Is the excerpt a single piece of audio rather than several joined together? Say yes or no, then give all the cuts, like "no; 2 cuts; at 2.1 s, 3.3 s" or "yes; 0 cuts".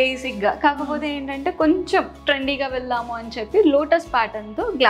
no; 1 cut; at 2.2 s